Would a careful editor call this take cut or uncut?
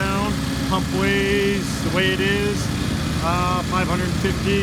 uncut